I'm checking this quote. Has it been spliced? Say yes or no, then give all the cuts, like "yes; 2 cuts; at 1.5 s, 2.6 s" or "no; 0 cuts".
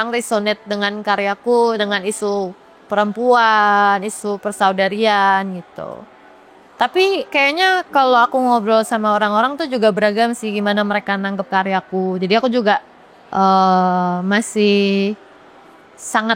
no; 0 cuts